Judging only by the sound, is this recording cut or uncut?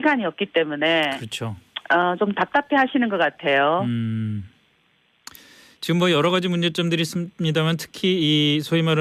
uncut